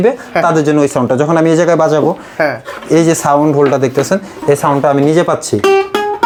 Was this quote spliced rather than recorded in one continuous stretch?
no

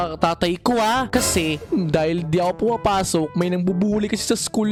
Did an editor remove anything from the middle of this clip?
no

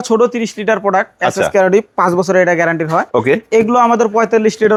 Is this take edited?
no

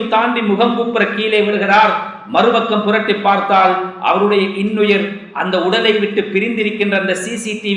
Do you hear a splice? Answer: no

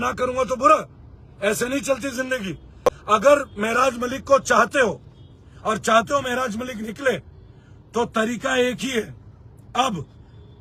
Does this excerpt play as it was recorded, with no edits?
yes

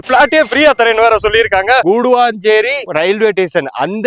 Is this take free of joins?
no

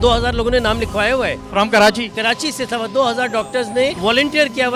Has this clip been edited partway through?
no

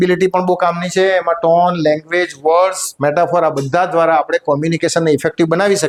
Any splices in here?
no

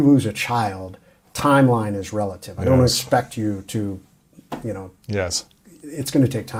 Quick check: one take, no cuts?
yes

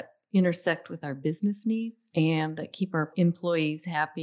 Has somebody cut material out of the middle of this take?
yes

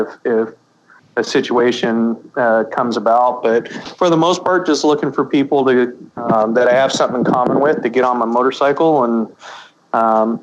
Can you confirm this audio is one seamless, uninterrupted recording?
yes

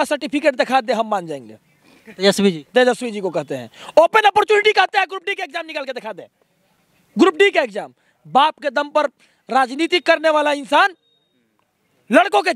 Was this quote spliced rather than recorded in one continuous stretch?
no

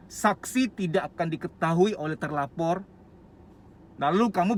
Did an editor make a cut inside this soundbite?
no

